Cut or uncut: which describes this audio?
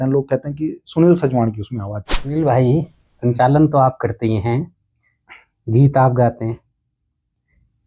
cut